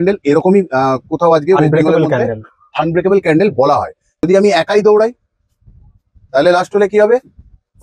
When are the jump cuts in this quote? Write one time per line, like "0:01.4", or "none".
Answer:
0:04.2